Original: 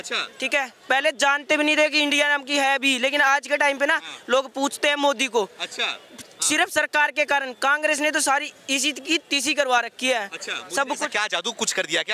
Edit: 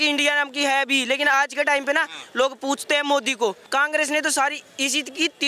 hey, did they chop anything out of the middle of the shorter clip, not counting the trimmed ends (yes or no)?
yes